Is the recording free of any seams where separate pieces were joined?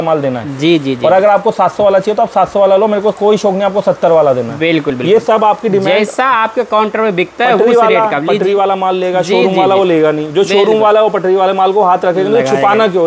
yes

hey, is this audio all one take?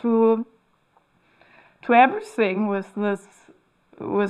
yes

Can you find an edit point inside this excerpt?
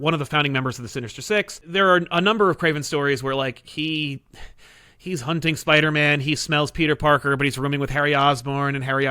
yes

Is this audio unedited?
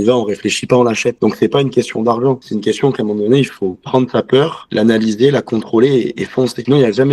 yes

